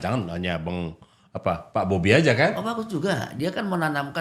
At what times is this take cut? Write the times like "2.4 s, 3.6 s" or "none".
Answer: none